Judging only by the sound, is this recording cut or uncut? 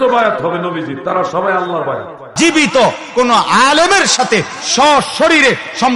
cut